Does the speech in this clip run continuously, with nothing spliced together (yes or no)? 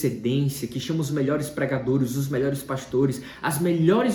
yes